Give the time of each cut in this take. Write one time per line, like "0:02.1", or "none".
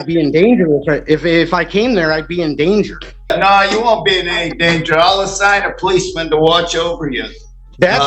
0:03.3